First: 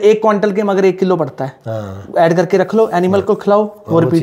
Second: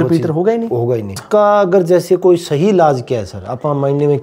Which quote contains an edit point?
second; 1 cut; at 1.2 s

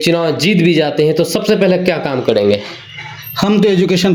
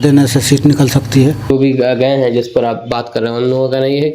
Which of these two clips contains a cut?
second; 1 cut; at 1.5 s

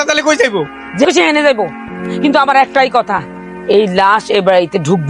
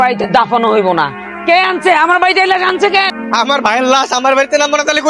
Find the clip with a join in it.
second; 1 cut; at 3.2 s

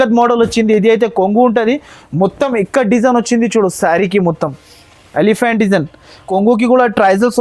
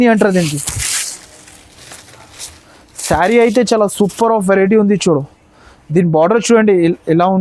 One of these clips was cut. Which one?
first; 1 cut; at 6.3 s

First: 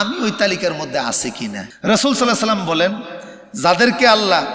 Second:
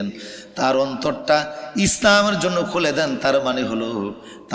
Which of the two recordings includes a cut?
first; 1 cut; at 1.7 s

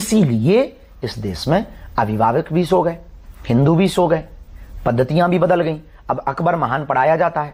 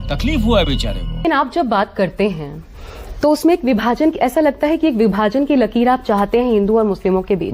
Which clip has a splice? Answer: second; 1 cut; at 1.2 s

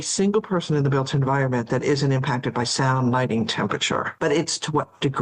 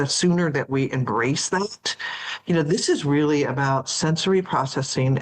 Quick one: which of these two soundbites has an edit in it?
first; 1 cut; at 4.1 s

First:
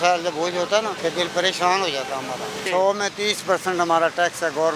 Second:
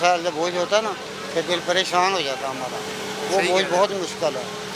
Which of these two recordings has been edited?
first; 2 cuts; at 0.9 s, 2.6 s

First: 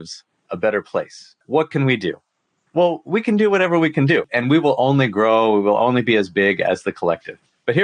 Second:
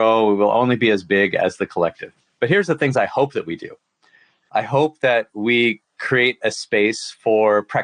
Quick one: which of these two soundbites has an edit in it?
first; 2 cuts; at 1.4 s, 4.3 s

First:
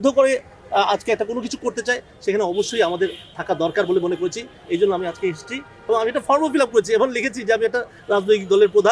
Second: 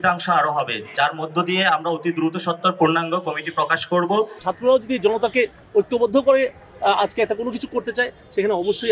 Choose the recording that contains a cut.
second; 1 cut; at 4.4 s

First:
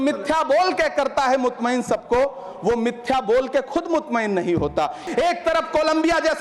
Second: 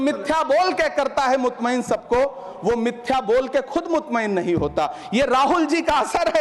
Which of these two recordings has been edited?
first; 1 cut; at 5.0 s

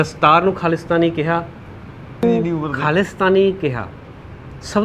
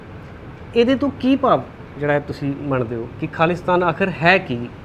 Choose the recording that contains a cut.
first; 1 cut; at 2.2 s

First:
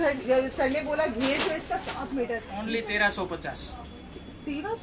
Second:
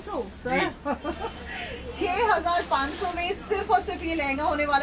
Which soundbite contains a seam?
first; 1 cut; at 2.5 s

